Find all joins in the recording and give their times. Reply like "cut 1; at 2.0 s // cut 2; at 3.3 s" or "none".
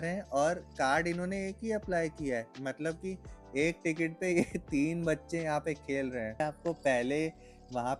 cut 1; at 6.4 s